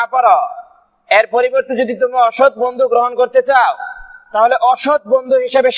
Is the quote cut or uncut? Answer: uncut